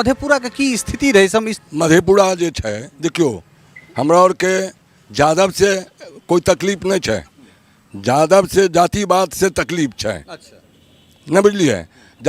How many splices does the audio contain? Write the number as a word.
one